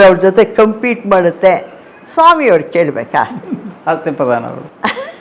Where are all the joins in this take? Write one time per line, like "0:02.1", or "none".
none